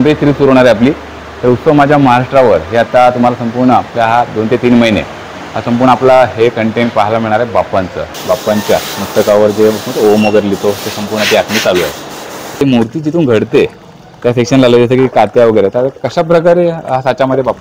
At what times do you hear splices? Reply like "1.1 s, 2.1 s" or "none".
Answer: 8.1 s, 12.6 s